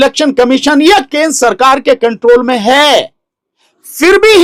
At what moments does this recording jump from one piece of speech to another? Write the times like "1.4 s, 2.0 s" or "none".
none